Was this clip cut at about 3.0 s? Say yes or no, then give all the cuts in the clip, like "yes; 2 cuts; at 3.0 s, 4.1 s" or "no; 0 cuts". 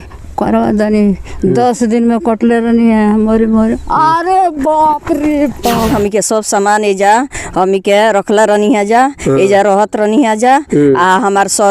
no; 1 cut; at 5.9 s